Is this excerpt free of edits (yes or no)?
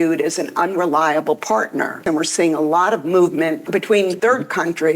no